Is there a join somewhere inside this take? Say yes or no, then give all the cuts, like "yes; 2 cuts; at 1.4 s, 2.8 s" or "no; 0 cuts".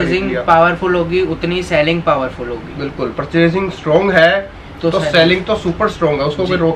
no; 0 cuts